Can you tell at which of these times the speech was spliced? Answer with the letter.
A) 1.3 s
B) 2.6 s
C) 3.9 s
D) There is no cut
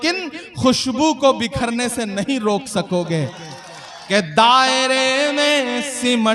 C